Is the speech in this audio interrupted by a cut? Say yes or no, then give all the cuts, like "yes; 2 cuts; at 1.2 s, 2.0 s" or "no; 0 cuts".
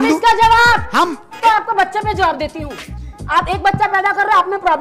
no; 0 cuts